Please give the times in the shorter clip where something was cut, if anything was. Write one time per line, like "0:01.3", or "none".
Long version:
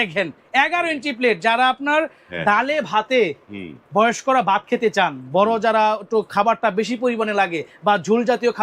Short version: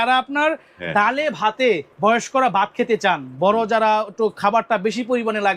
0:01.9